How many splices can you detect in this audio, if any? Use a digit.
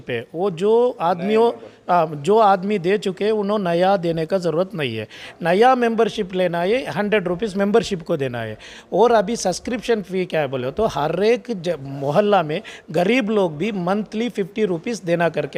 0